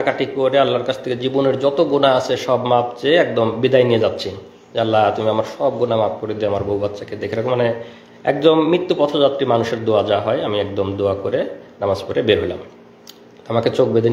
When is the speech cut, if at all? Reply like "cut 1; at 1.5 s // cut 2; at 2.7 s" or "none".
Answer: none